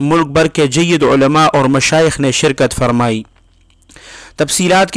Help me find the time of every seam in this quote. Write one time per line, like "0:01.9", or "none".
none